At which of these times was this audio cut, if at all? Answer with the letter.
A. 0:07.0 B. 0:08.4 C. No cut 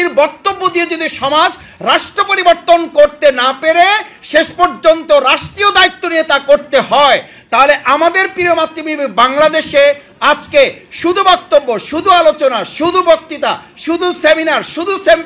C